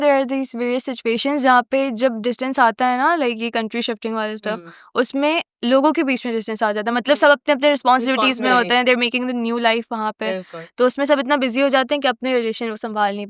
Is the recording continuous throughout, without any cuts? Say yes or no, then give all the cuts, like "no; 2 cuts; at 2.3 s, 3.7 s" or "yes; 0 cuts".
yes; 0 cuts